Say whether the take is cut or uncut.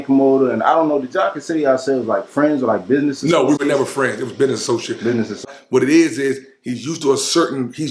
cut